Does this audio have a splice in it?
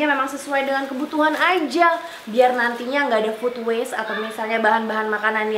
no; 0 cuts

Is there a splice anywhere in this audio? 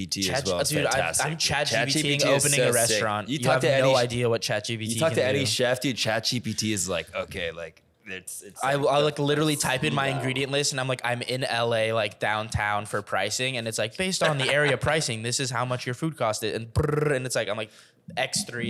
no; 0 cuts

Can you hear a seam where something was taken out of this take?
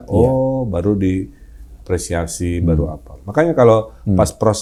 no; 0 cuts

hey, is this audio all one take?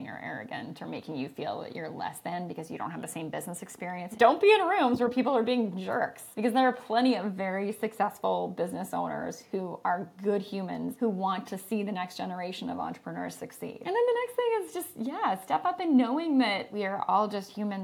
no; 5 cuts; at 4.1 s, 6.2 s, 10.9 s, 13.8 s, 16.7 s

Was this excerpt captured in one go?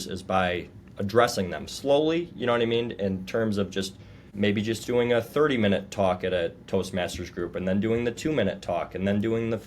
no; 1 cut; at 4.3 s

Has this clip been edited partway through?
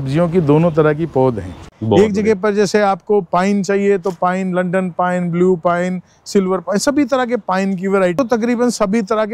yes; 2 cuts; at 1.5 s, 8.2 s

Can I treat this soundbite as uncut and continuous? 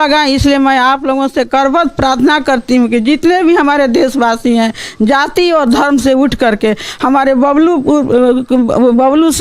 yes; 0 cuts

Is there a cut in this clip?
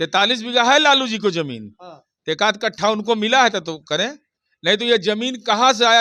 no; 0 cuts

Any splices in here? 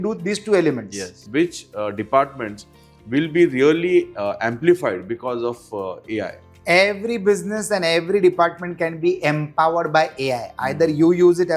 yes; 1 cut; at 1.1 s

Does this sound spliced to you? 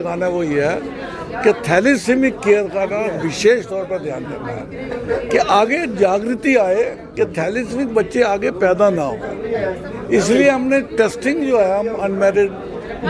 no; 0 cuts

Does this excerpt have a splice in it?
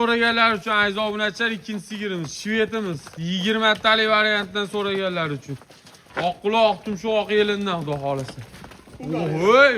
no; 0 cuts

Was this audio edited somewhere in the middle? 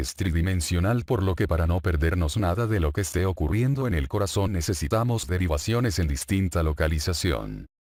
no; 0 cuts

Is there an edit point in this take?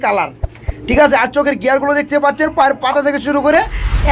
no; 0 cuts

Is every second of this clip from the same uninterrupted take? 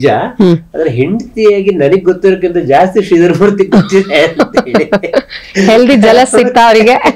yes; 0 cuts

